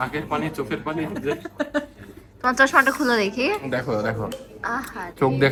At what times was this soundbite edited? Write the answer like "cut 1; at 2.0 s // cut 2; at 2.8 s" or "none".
none